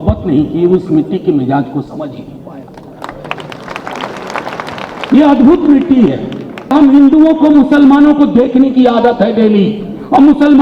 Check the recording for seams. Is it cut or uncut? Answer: cut